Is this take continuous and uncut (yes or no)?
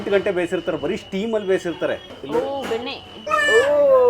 no